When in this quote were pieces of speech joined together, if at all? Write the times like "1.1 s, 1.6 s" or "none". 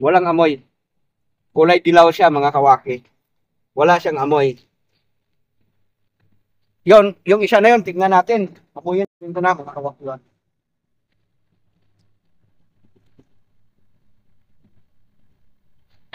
9.1 s